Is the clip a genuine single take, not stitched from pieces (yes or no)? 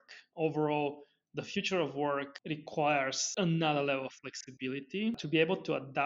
no